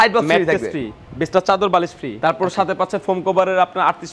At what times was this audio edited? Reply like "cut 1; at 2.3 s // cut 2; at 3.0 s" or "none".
none